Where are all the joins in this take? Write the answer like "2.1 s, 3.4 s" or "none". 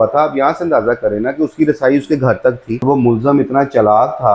2.8 s